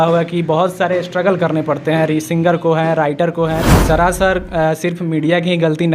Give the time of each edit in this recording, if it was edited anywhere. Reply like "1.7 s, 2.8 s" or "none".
3.7 s